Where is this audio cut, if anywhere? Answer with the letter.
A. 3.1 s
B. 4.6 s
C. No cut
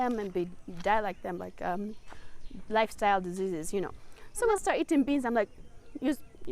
B